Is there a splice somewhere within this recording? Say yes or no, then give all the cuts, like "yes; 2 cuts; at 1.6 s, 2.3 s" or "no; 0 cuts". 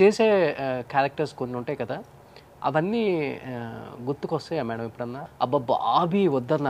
yes; 1 cut; at 5.2 s